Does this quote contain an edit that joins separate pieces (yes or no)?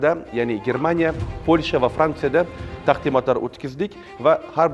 no